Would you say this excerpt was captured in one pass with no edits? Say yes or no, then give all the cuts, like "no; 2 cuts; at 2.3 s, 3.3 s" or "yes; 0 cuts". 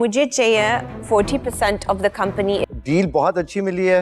no; 1 cut; at 2.7 s